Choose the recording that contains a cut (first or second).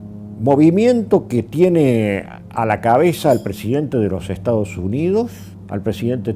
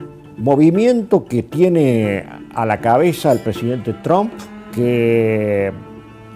second